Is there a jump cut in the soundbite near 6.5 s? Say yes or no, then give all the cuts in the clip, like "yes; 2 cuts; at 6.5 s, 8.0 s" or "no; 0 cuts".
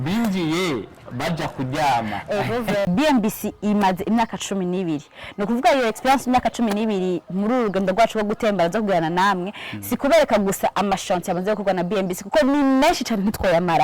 no; 1 cut; at 2.9 s